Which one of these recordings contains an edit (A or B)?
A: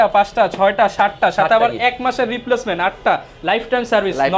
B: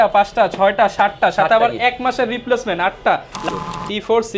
B